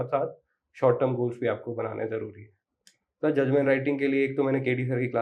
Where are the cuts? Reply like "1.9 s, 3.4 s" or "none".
2.6 s